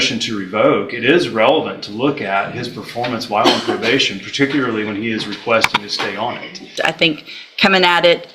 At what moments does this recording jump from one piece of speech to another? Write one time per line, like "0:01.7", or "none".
0:06.7